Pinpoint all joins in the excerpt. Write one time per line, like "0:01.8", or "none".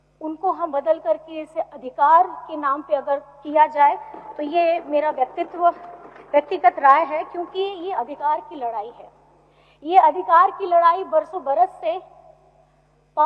none